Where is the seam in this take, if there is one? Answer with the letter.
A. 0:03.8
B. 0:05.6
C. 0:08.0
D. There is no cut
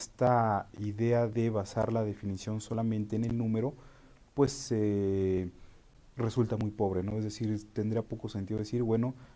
A